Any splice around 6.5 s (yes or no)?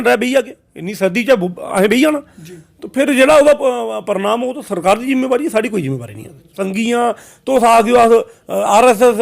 yes